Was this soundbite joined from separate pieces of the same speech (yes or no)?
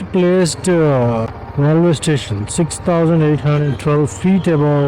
yes